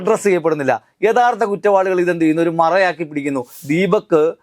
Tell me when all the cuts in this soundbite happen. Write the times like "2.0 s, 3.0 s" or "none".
3.5 s